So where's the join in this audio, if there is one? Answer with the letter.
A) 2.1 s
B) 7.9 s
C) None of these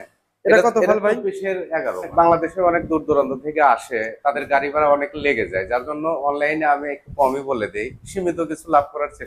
A